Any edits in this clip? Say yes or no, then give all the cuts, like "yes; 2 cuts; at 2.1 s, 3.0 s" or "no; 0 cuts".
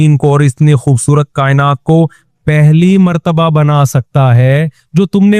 no; 0 cuts